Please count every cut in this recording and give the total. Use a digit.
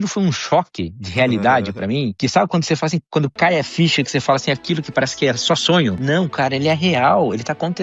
2